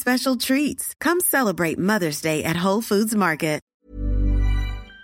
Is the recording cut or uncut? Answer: cut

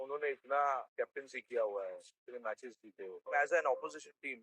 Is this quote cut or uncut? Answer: cut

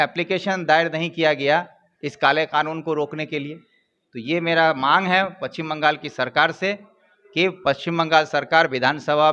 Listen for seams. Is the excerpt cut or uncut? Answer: uncut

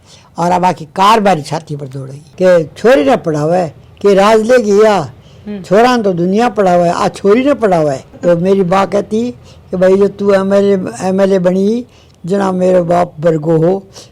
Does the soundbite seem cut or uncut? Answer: cut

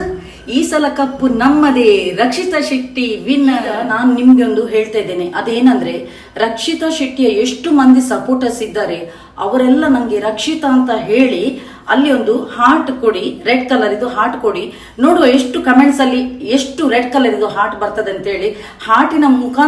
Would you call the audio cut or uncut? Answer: cut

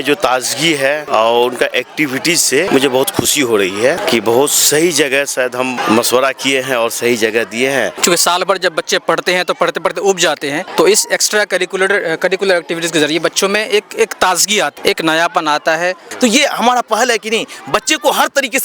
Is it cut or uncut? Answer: cut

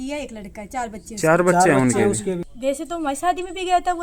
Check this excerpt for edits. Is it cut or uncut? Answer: cut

